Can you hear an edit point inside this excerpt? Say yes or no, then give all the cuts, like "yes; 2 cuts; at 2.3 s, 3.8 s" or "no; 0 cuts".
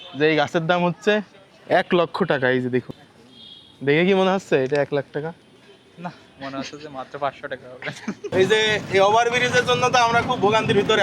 yes; 2 cuts; at 2.9 s, 8.3 s